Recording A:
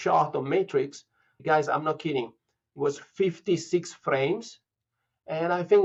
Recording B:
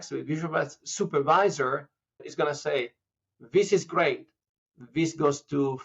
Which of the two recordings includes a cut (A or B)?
B